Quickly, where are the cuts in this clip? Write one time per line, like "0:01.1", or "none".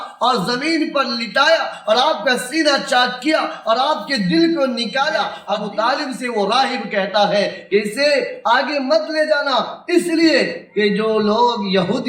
0:05.4